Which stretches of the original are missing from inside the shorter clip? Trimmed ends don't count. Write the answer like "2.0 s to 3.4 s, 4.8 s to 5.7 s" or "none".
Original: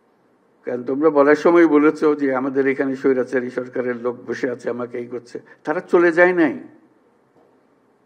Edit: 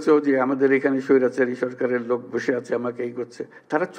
none